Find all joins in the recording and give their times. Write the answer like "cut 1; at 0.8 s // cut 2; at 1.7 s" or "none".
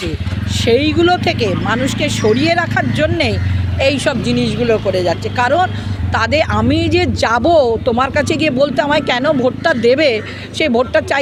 none